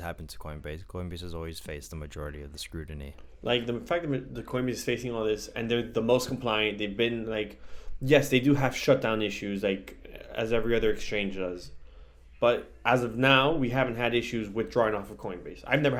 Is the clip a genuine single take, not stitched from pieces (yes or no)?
yes